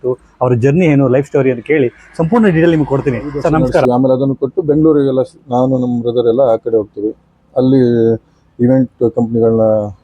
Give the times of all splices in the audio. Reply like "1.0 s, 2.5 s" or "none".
3.8 s

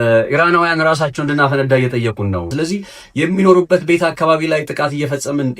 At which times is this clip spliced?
2.5 s

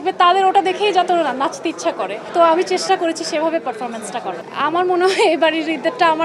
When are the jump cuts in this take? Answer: none

